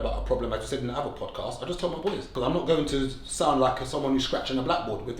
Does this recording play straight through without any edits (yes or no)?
no